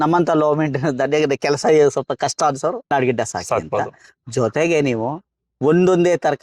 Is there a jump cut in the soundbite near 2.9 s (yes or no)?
yes